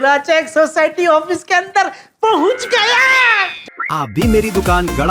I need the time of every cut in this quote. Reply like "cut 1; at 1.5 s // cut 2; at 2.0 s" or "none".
cut 1; at 3.6 s